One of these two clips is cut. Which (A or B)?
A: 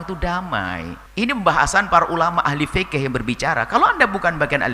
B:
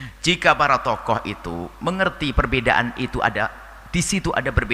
A